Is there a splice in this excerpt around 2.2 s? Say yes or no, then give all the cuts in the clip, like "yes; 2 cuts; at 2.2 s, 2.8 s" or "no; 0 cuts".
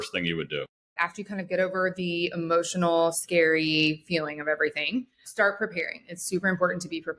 no; 2 cuts; at 0.9 s, 5.2 s